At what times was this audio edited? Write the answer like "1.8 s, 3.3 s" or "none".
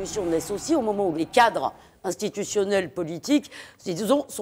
1.2 s